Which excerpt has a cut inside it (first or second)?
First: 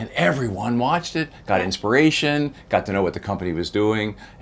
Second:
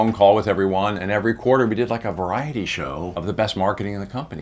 second